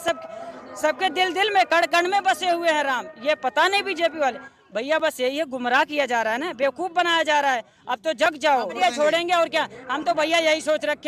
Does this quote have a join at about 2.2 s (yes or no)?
no